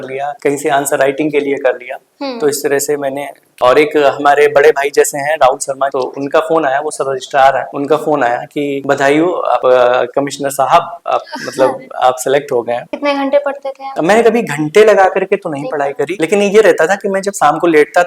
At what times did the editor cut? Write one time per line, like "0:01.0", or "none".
0:03.5
0:12.9